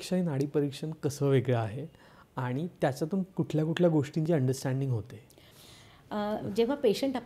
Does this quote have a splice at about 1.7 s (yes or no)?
no